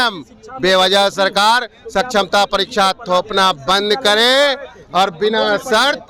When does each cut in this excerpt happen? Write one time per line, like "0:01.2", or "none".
none